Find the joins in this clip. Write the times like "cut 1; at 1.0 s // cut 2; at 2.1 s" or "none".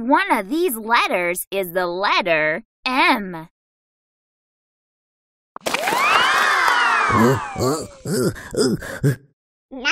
cut 1; at 2.7 s